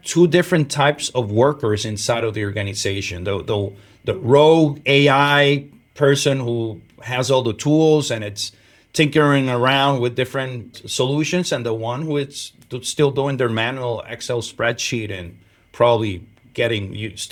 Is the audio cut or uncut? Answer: uncut